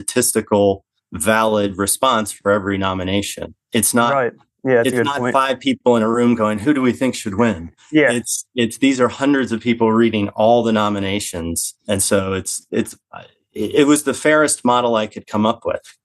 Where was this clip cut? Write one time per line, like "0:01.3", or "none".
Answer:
none